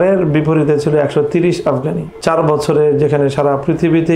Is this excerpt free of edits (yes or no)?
no